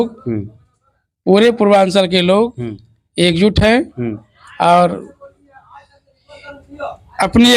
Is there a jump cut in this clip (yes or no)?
no